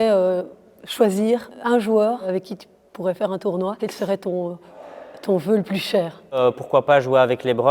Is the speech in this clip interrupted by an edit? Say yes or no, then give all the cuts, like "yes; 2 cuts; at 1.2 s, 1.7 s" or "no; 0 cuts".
yes; 4 cuts; at 1.5 s, 2.2 s, 3.8 s, 6.4 s